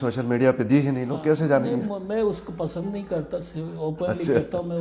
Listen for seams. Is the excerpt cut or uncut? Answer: uncut